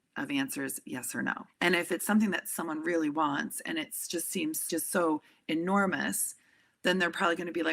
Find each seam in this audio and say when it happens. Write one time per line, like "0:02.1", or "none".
0:01.5
0:04.7